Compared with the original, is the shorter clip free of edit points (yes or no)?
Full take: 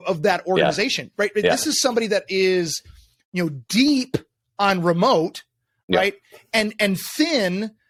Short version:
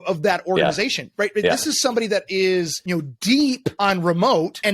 no